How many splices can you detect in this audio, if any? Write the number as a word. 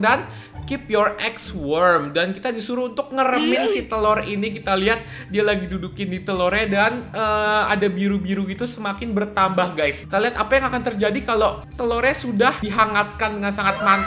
three